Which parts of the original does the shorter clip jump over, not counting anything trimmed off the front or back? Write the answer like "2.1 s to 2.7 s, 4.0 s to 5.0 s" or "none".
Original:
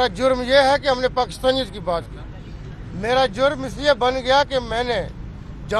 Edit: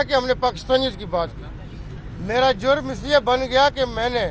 none

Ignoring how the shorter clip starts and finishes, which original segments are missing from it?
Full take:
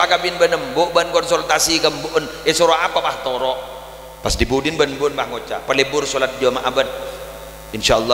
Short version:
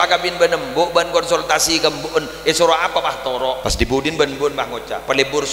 3.6 s to 4.2 s

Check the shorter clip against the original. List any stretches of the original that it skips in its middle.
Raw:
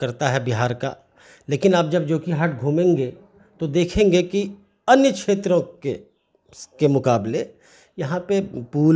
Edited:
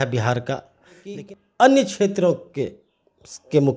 1.5 s to 4.5 s

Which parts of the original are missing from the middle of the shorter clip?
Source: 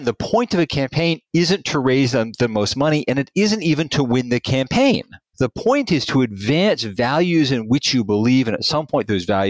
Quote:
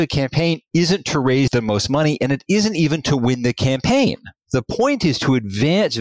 2.1 s to 2.4 s

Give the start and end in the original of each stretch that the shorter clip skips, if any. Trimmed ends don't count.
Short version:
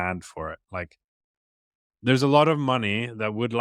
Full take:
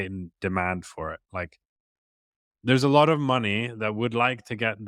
none

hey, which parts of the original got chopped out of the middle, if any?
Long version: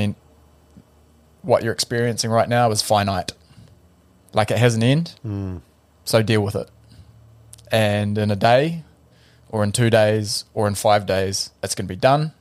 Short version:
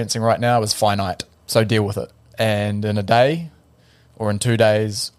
3.4 s to 5.9 s, 6.8 s to 7.5 s

